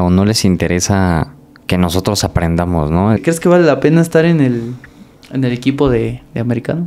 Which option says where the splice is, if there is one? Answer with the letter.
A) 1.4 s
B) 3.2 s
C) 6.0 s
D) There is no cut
B